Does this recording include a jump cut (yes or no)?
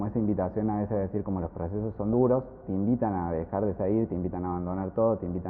no